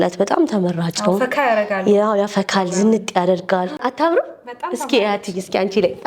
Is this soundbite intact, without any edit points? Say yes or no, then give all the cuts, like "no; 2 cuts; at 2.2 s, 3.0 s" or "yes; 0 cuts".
no; 1 cut; at 3.9 s